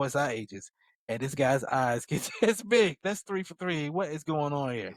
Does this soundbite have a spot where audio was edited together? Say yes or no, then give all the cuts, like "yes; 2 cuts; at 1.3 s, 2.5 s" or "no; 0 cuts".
yes; 1 cut; at 3.0 s